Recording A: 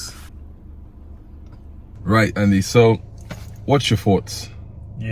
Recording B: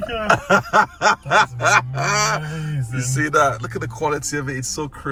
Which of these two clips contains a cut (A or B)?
A